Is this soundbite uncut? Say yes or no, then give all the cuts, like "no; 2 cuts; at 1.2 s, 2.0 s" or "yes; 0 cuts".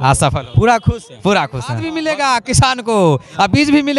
no; 1 cut; at 1.9 s